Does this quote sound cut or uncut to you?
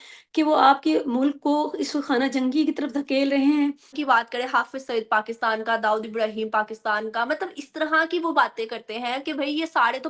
cut